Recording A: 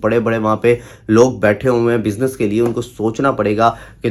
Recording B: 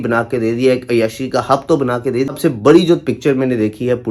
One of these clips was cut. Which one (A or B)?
B